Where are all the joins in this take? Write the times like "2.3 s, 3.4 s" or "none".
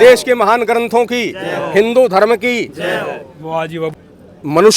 3.6 s